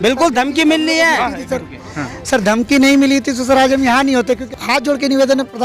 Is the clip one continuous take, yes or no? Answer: no